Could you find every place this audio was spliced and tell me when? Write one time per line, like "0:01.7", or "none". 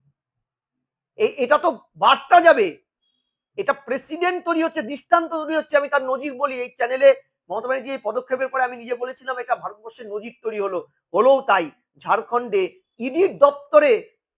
none